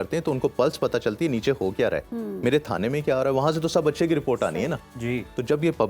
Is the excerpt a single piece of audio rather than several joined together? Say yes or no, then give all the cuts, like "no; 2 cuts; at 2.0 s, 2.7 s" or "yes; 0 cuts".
yes; 0 cuts